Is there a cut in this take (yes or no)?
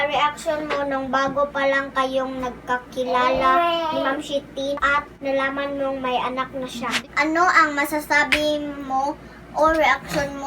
yes